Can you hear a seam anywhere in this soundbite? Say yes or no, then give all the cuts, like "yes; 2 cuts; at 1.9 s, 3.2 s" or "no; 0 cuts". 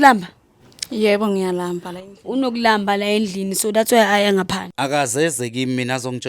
yes; 1 cut; at 4.6 s